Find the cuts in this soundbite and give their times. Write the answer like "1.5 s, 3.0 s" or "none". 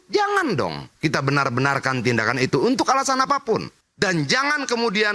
3.8 s